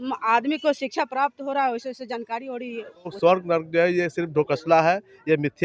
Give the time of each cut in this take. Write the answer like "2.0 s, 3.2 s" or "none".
3.1 s